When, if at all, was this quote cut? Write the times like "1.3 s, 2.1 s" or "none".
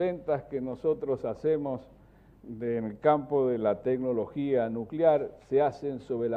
0.9 s